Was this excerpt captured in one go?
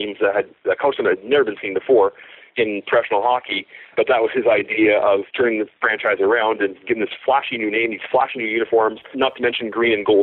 no; 3 cuts; at 3.9 s, 5.3 s, 9.1 s

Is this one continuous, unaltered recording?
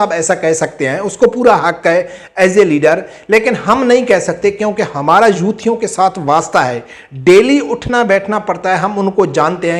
yes; 0 cuts

